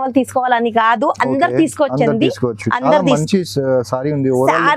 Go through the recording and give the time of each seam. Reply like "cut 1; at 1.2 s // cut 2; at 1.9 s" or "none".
none